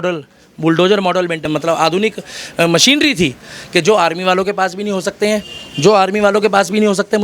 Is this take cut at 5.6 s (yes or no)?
no